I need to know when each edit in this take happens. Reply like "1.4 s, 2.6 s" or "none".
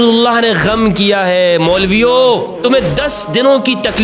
2.5 s